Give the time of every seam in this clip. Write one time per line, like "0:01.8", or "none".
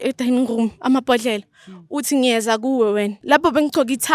0:03.2